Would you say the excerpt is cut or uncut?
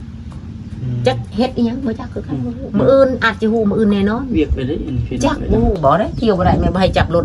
cut